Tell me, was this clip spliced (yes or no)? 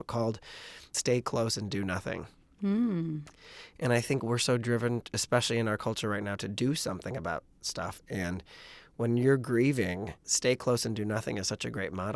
yes